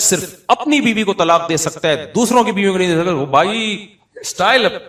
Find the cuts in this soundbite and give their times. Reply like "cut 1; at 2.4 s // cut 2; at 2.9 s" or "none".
cut 1; at 3.9 s